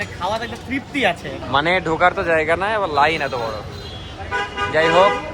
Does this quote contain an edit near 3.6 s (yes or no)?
no